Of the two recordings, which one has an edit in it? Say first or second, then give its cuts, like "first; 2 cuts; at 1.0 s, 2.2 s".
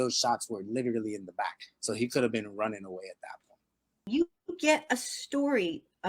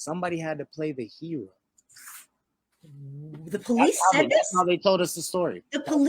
first; 1 cut; at 4.0 s